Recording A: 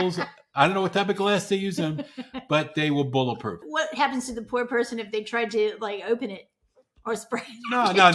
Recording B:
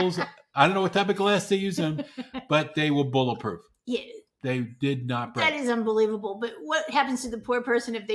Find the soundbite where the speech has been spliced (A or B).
A